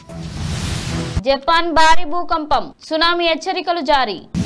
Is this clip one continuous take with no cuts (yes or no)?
yes